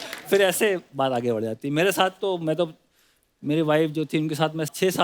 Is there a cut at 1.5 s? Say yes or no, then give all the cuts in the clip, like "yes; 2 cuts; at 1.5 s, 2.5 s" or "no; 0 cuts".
no; 0 cuts